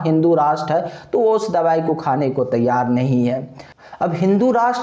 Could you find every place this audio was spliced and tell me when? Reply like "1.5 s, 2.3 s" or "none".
none